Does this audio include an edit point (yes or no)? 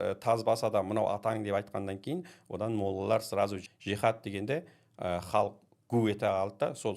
yes